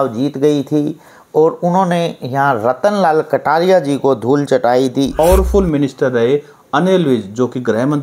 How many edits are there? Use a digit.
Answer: 1